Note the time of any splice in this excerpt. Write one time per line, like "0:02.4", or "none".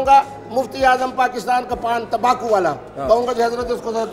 none